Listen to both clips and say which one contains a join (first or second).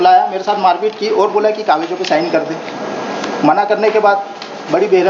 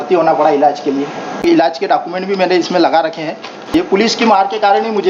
second